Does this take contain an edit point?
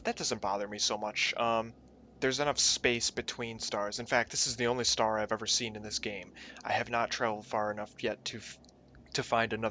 yes; 1 cut; at 2.7 s

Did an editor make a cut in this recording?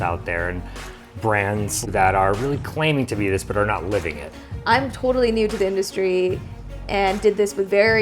yes; 2 cuts; at 1.8 s, 4.4 s

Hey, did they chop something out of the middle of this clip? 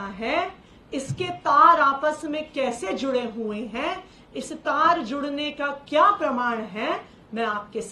no; 0 cuts

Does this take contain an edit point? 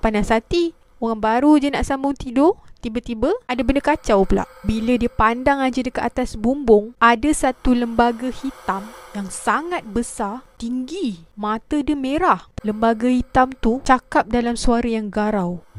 yes; 6 cuts; at 3.5 s, 6.9 s, 10.5 s, 11.3 s, 12.5 s, 13.8 s

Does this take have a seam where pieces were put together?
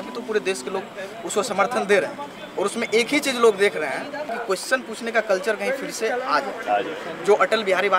yes; 1 cut; at 4.4 s

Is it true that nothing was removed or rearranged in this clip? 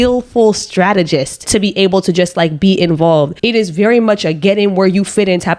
yes; 0 cuts

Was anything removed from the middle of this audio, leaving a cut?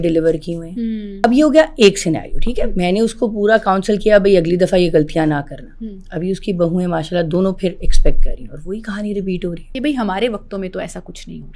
yes; 2 cuts; at 1.1 s, 9.7 s

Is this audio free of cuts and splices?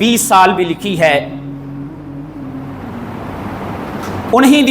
yes; 0 cuts

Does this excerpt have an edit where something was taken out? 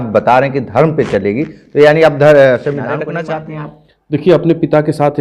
yes; 1 cut; at 3.0 s

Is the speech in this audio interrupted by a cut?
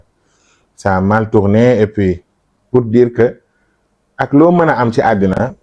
no; 0 cuts

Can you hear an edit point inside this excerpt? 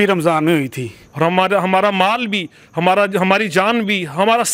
yes; 1 cut; at 1.0 s

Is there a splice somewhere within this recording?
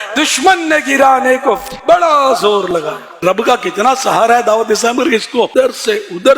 yes; 2 cuts; at 3.2 s, 5.5 s

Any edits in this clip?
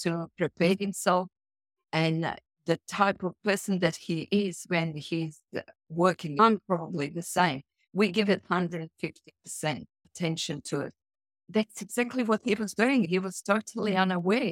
yes; 4 cuts; at 6.4 s, 10.0 s, 11.4 s, 13.1 s

